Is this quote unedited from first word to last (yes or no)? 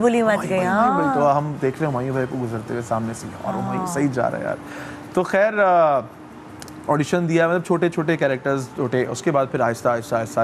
yes